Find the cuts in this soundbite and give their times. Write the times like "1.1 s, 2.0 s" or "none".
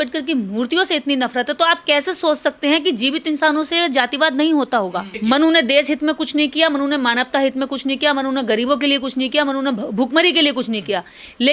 5.1 s